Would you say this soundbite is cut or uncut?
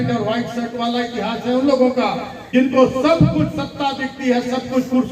cut